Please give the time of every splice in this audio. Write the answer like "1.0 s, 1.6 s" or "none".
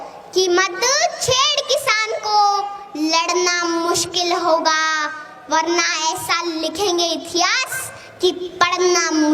none